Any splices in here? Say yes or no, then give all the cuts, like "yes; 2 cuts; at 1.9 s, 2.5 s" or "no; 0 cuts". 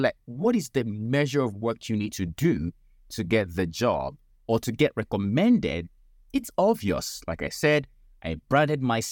no; 0 cuts